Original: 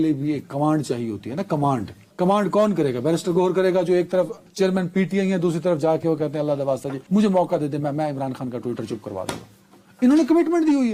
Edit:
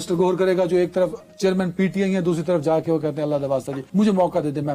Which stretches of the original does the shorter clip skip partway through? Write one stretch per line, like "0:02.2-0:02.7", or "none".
none